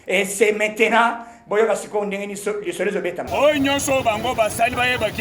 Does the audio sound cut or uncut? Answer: cut